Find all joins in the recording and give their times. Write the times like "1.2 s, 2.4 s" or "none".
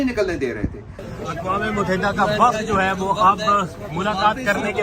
0.9 s